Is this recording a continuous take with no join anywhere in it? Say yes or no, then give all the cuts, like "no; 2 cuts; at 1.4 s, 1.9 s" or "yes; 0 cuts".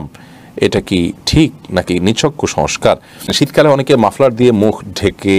no; 1 cut; at 3.3 s